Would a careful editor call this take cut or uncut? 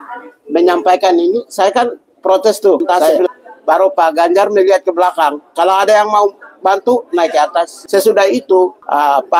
cut